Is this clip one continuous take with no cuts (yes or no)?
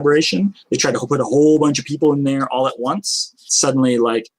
no